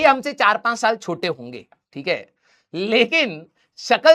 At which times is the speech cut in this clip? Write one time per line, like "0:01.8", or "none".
none